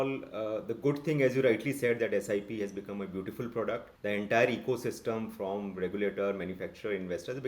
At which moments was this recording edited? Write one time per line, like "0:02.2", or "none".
0:03.9